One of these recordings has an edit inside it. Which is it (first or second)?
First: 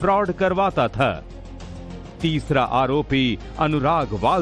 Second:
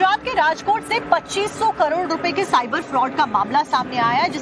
second